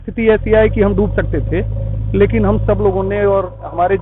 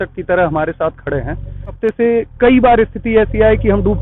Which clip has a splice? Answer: second; 1 cut; at 1.8 s

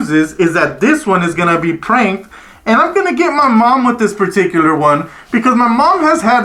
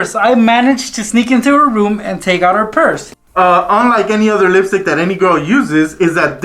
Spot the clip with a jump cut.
second; 1 cut; at 3.1 s

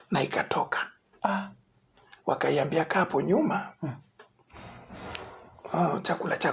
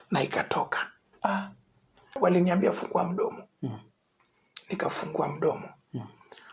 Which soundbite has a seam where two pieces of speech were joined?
second; 1 cut; at 2.1 s

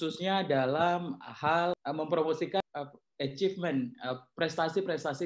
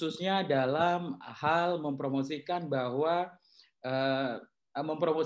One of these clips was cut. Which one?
first; 2 cuts; at 1.8 s, 2.6 s

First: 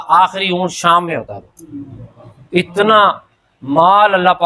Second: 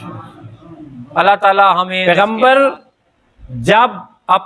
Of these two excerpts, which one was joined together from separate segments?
second; 1 cut; at 1.9 s

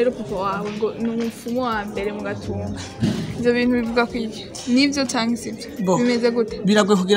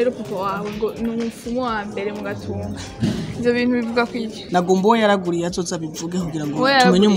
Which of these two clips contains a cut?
second; 1 cut; at 4.5 s

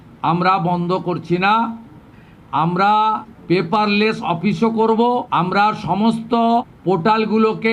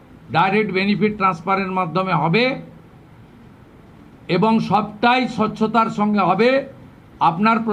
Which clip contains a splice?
first; 3 cuts; at 3.3 s, 5.3 s, 6.7 s

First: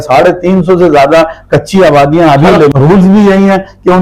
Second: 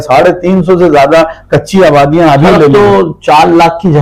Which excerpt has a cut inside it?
first; 1 cut; at 2.7 s

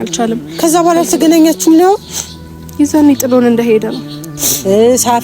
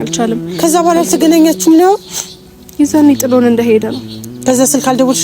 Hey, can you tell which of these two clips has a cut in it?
first; 1 cut; at 4.3 s

